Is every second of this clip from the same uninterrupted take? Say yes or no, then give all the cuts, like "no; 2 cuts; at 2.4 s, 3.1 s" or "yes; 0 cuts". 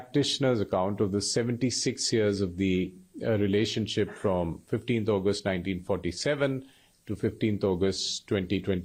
yes; 0 cuts